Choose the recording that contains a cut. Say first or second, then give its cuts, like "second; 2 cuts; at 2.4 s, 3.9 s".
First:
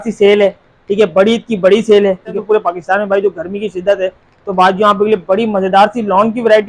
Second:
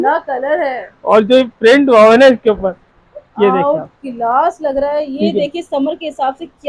first; 1 cut; at 2.4 s